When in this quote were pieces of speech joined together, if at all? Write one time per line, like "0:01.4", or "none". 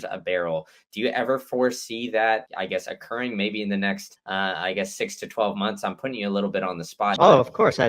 0:02.5
0:04.1
0:07.2